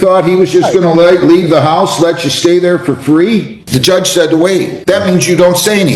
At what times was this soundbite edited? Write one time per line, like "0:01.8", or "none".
0:03.6
0:04.7